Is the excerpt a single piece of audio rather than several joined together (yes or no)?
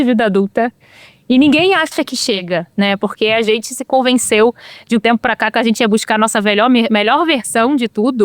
no